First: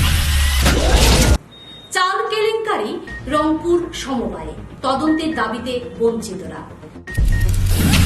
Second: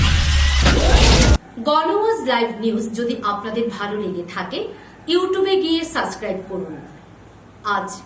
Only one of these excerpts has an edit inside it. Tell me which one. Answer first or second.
first